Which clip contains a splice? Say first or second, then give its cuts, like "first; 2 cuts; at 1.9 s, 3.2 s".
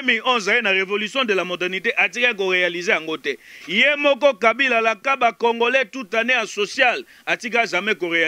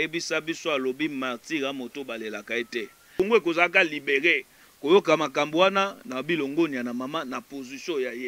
second; 1 cut; at 3.1 s